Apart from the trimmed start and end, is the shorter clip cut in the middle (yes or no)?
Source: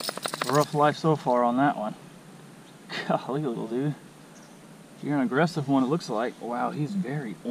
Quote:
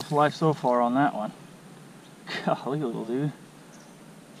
no